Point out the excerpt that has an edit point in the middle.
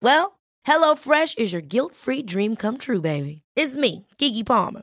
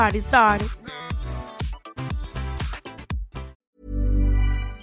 second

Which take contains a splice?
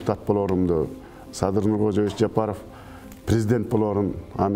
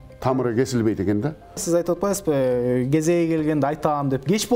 second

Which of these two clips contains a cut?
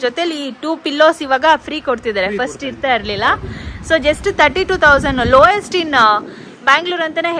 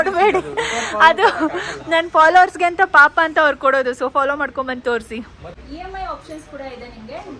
second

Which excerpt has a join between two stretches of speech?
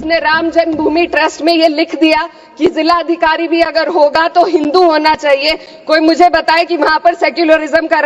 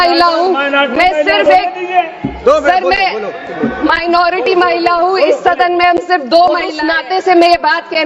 second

